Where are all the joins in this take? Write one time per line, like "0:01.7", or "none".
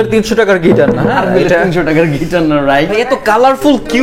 0:02.9